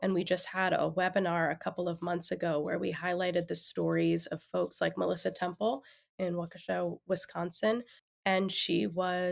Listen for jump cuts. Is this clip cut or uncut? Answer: cut